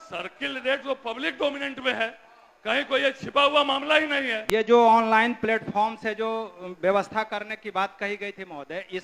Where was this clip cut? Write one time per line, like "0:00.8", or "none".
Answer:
0:04.4